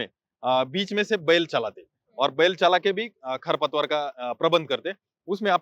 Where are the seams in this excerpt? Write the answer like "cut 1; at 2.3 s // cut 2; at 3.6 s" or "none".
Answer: none